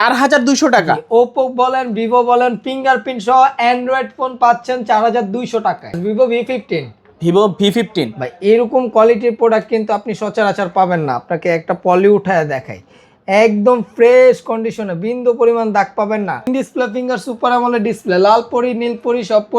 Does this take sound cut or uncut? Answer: cut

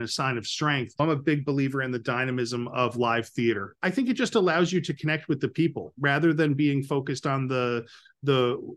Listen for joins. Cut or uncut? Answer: cut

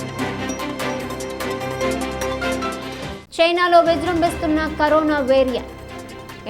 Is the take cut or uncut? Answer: cut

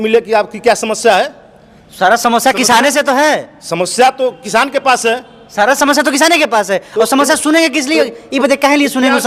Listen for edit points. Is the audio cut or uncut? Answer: uncut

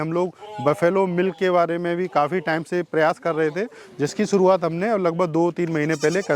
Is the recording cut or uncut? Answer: uncut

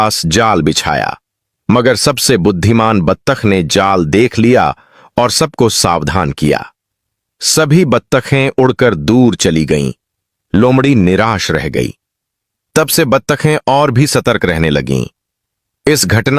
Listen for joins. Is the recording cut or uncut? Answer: uncut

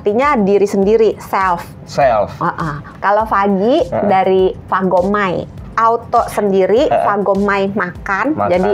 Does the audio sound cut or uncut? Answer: cut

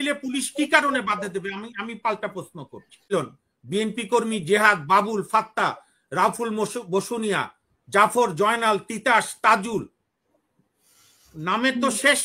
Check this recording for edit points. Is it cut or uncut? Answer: cut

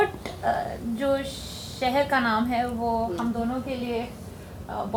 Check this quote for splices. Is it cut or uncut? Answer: uncut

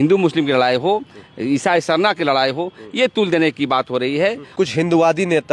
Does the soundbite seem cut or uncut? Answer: cut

